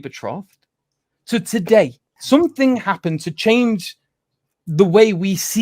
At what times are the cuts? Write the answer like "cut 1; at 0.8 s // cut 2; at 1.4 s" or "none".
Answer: cut 1; at 2.1 s